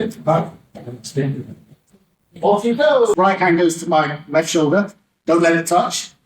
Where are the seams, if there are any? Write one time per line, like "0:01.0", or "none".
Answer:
0:03.1